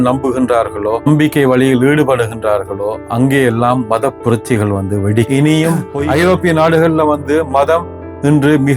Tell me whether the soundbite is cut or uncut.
cut